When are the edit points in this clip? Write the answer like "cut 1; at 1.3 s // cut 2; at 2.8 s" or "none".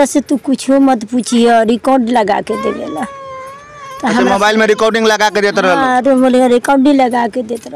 none